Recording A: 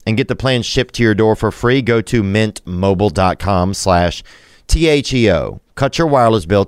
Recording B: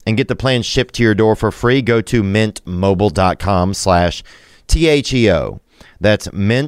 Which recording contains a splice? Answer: A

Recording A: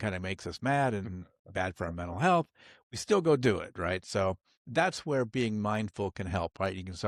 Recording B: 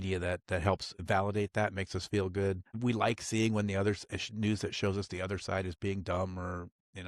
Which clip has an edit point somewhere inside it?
B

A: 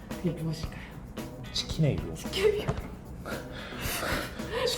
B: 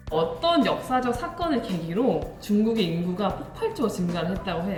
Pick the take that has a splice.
A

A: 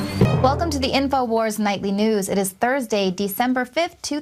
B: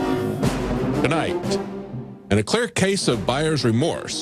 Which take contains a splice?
B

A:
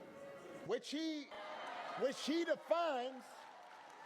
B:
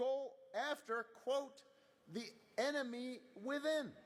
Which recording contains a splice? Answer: A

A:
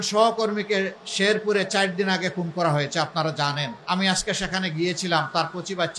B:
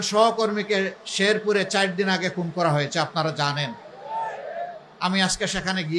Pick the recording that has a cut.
A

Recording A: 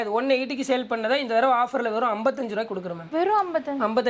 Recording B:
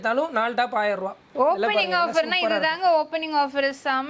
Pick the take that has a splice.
B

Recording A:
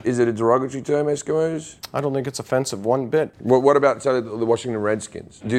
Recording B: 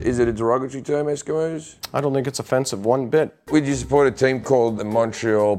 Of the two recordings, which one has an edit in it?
B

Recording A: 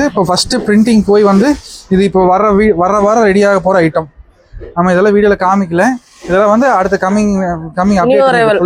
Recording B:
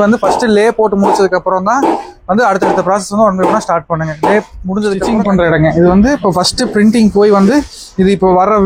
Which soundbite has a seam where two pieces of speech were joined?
B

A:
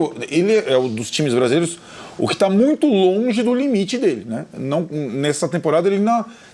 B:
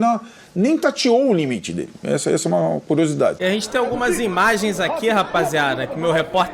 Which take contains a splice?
B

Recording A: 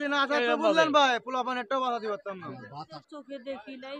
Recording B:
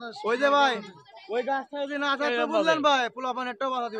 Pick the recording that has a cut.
A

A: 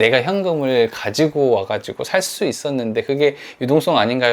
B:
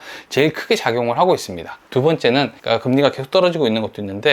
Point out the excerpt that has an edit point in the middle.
B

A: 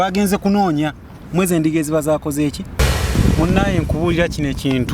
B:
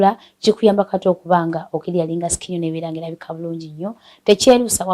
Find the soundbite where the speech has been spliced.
A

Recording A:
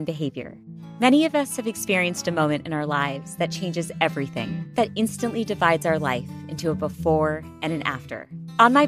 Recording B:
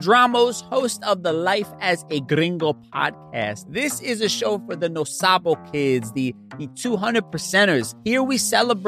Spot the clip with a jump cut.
B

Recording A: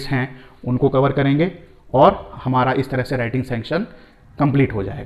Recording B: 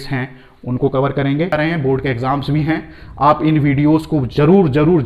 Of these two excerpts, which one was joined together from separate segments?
B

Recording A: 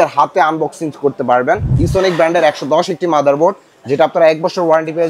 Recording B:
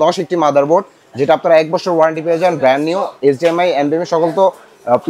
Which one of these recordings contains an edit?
A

